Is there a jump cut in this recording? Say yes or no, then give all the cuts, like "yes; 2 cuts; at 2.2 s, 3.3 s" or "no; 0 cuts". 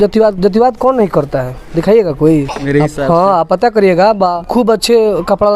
yes; 2 cuts; at 2.6 s, 4.4 s